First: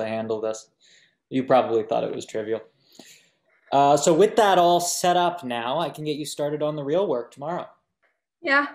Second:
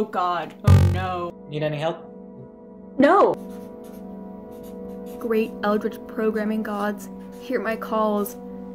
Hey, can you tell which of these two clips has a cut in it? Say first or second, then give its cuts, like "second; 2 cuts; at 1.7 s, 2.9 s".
second; 2 cuts; at 1.3 s, 3.3 s